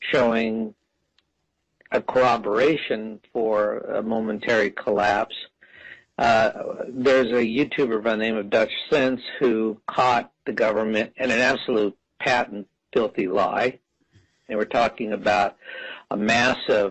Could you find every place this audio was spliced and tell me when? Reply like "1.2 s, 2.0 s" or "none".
5.1 s